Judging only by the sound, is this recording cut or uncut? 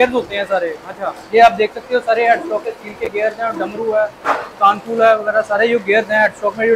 uncut